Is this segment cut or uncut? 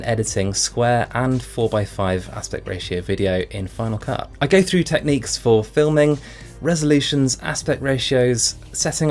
cut